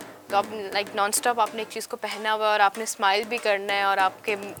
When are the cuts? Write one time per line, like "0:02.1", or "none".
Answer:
none

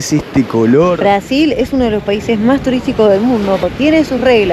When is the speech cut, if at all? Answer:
0:01.0
0:03.6

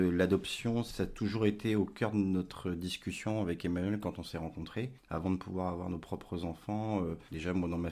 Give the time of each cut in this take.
none

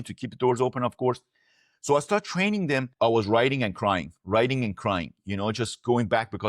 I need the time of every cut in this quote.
0:02.9

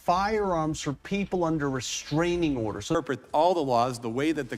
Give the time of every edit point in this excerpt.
0:03.0

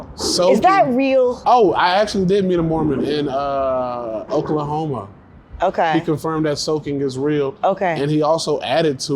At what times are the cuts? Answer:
0:01.4

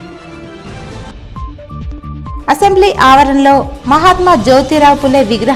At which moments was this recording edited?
0:01.1

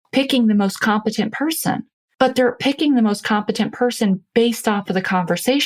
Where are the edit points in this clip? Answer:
0:02.0

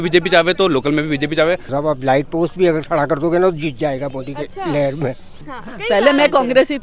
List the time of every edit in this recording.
0:01.7
0:05.4

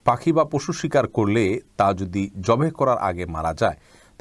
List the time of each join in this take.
none

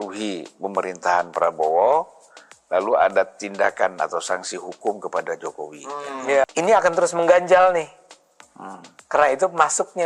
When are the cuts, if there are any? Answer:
0:06.4

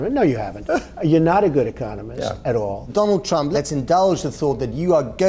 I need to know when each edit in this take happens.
0:03.3

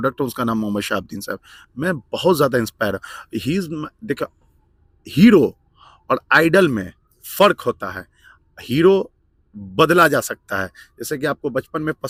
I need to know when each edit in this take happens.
none

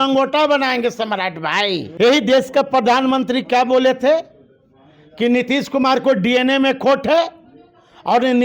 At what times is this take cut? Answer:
0:01.9

